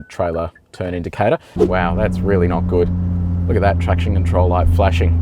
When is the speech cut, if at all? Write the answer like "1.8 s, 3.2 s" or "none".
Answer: 1.5 s